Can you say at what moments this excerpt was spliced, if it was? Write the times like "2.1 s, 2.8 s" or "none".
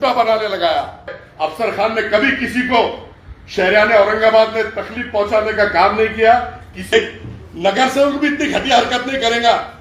1.2 s, 6.9 s